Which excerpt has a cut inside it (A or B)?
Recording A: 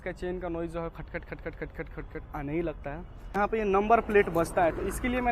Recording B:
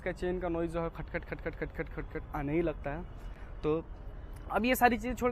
A